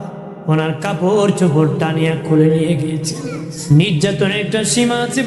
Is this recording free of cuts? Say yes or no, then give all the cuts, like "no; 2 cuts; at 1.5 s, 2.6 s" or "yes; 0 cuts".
no; 1 cut; at 3.6 s